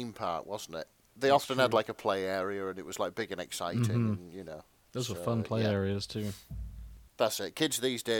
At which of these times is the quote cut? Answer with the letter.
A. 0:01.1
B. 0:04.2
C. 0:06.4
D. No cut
A